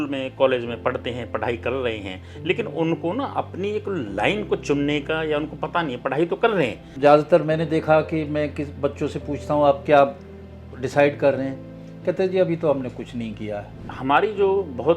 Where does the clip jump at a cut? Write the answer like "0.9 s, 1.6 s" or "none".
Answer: 6.9 s, 13.9 s

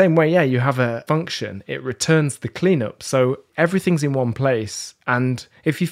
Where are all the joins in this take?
1.0 s, 3.5 s

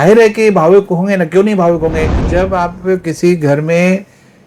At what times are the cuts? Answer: 2.2 s

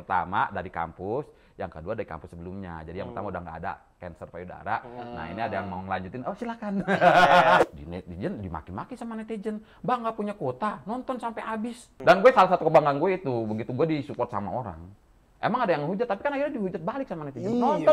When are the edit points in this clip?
7.6 s, 11.9 s

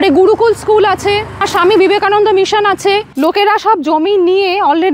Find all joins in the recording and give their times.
1.5 s, 3.1 s

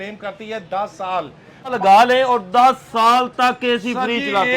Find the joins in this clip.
1.7 s

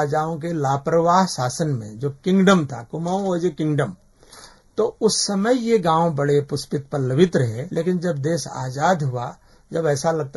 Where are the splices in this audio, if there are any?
7.6 s

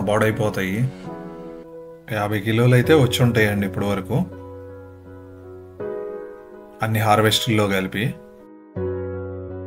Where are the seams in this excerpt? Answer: 1.7 s

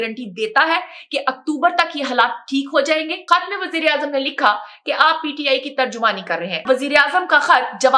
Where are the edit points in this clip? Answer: 3.2 s, 6.6 s

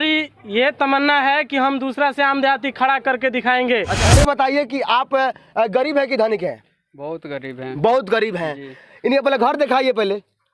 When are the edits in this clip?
4.0 s

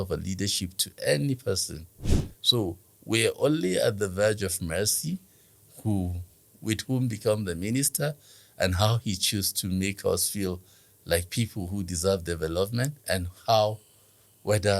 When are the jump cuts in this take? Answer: 13.0 s

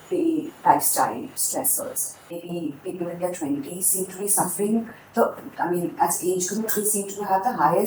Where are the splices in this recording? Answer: 2.4 s

